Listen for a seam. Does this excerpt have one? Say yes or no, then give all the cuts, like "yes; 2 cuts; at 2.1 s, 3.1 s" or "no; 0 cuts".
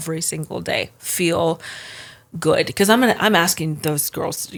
no; 0 cuts